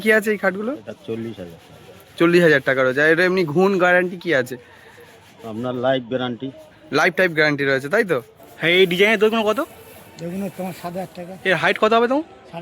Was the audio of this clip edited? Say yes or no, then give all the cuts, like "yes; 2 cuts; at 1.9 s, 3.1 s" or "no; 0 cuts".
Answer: yes; 1 cut; at 8.4 s